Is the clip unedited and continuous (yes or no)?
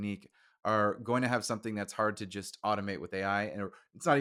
yes